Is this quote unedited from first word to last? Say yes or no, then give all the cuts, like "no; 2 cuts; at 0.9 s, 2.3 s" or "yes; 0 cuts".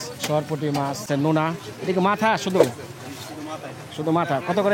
no; 1 cut; at 1.0 s